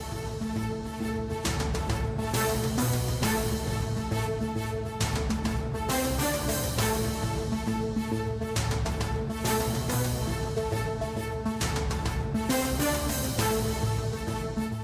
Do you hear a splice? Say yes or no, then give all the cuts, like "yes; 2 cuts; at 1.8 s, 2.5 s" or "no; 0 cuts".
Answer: no; 0 cuts